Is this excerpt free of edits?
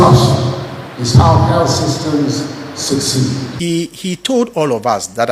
no; 1 cut; at 3.5 s

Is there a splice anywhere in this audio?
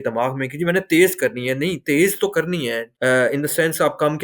yes; 1 cut; at 2.9 s

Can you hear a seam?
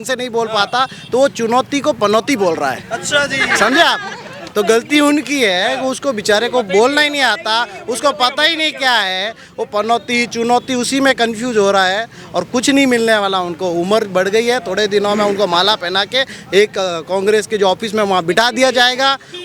no; 0 cuts

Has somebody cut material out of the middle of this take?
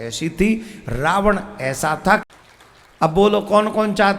yes; 1 cut; at 2.2 s

